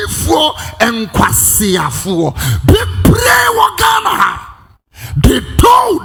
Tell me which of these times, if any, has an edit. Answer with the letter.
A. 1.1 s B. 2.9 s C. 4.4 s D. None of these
D